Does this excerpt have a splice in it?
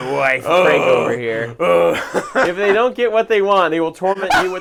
no; 0 cuts

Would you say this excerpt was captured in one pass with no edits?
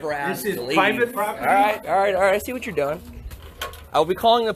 yes; 0 cuts

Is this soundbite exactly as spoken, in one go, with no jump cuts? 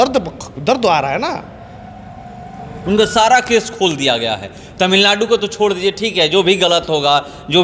yes; 0 cuts

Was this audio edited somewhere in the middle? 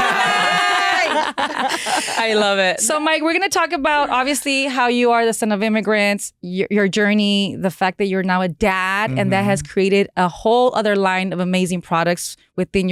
no; 0 cuts

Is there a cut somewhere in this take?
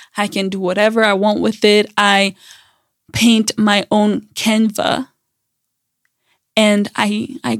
no; 0 cuts

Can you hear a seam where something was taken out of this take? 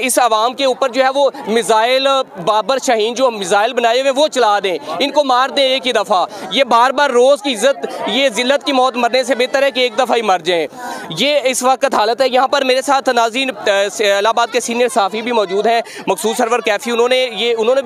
no; 0 cuts

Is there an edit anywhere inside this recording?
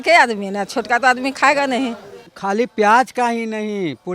yes; 1 cut; at 2.3 s

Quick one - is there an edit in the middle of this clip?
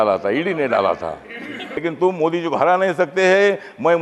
yes; 1 cut; at 1.8 s

